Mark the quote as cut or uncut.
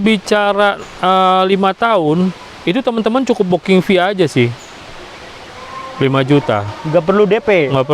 uncut